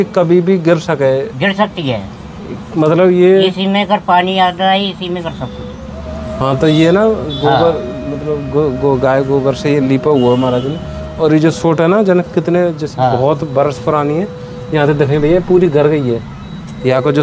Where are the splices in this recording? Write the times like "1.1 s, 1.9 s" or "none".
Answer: none